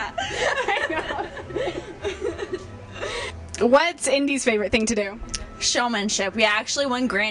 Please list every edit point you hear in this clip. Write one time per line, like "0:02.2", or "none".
0:03.4